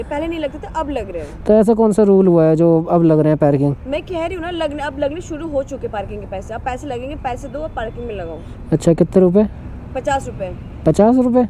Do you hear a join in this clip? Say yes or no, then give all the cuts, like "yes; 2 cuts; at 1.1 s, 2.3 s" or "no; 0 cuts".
no; 0 cuts